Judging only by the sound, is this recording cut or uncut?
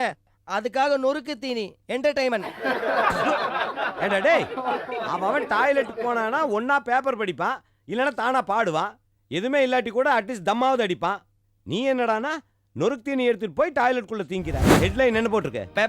cut